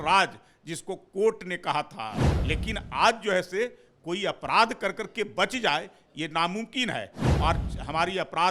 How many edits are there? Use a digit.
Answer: 1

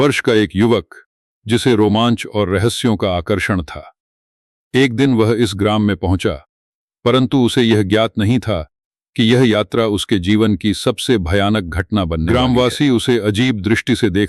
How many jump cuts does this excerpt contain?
1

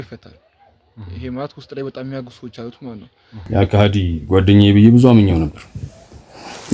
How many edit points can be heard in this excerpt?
1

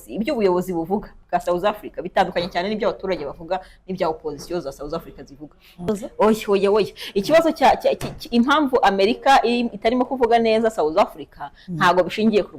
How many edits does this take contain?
1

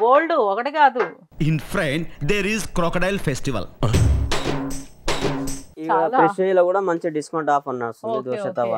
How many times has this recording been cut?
0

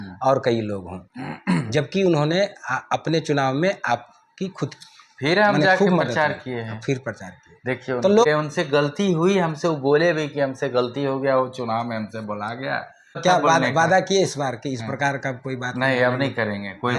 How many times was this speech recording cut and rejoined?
2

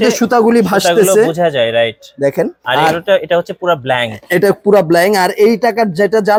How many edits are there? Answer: 0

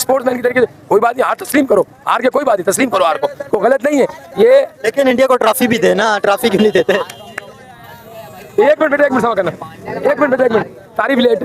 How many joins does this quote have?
0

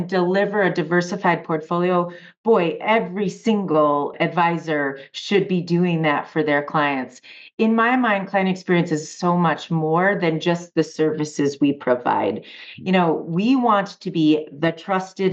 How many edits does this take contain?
1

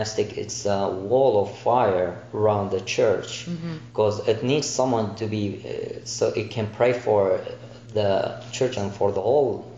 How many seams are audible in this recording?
1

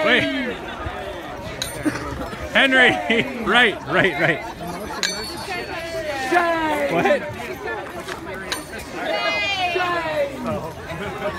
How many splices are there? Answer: 1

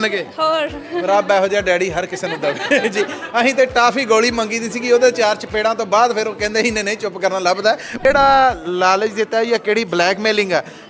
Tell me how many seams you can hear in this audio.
1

